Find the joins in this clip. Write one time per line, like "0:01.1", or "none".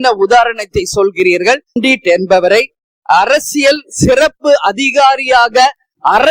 0:01.8